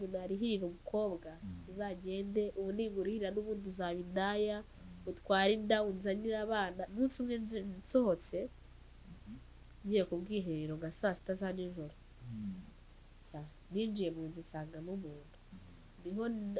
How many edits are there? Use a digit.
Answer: 1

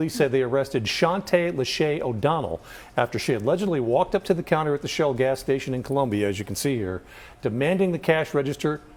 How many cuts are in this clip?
0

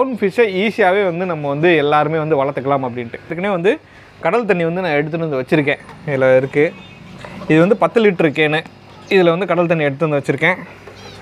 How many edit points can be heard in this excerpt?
1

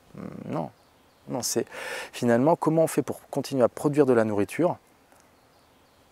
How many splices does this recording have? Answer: 1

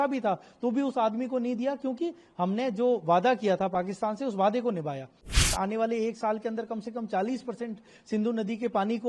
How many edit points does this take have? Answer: 1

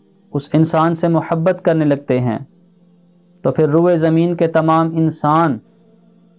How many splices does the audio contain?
0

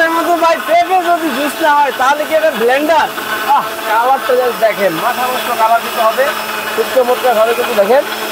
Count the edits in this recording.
0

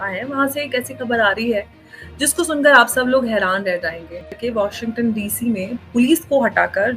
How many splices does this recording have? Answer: 1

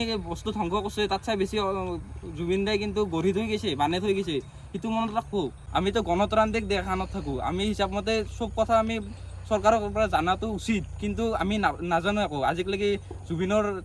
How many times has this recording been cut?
1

